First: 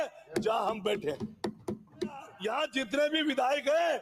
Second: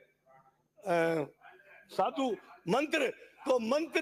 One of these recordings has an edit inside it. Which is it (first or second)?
first